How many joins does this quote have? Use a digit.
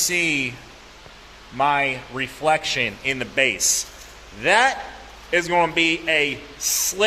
0